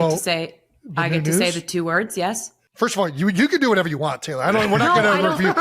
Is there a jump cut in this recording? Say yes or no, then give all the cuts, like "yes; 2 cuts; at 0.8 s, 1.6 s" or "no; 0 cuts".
yes; 1 cut; at 2.7 s